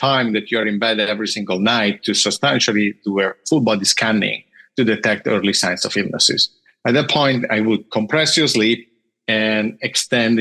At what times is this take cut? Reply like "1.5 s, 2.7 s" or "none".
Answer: none